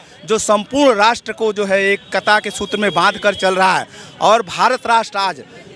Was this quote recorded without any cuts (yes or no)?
yes